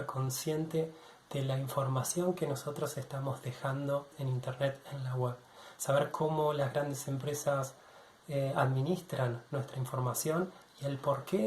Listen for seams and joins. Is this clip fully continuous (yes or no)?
no